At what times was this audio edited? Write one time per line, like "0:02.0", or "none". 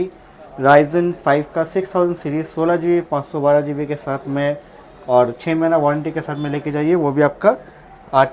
none